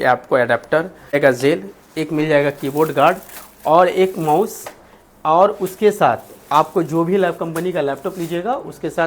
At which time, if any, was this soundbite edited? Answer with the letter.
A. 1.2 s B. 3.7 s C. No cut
A